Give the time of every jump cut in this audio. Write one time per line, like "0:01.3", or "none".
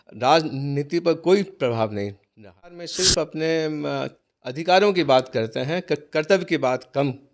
0:02.9